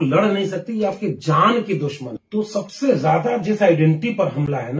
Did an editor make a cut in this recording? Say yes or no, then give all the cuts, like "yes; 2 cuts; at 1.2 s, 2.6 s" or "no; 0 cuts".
yes; 1 cut; at 2.0 s